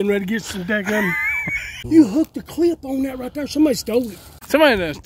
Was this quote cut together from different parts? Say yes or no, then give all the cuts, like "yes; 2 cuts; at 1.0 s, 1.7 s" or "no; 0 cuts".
yes; 2 cuts; at 1.8 s, 4.3 s